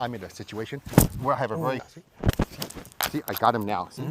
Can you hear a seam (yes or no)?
yes